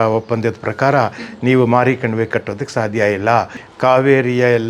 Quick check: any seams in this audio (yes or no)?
yes